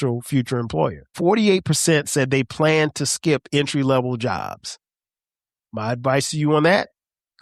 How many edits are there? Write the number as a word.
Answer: one